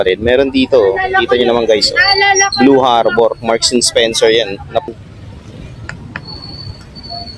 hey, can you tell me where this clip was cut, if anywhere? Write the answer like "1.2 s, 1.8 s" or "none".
4.9 s